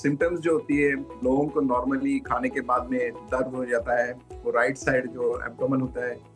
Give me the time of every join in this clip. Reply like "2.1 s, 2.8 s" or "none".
none